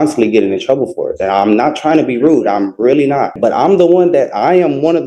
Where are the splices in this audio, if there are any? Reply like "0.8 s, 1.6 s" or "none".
3.3 s